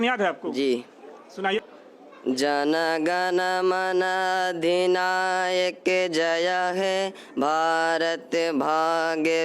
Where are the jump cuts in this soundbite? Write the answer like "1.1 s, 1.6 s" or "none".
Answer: 1.5 s